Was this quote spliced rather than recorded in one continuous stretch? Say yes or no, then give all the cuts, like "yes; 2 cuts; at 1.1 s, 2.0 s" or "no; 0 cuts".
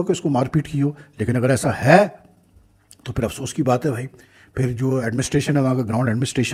no; 0 cuts